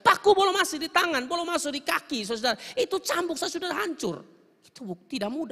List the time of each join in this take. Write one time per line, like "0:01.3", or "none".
none